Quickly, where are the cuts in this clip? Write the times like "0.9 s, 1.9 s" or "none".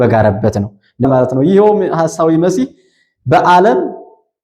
1.0 s